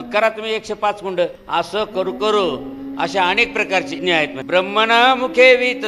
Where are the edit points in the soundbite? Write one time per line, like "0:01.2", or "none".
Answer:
0:01.4
0:04.0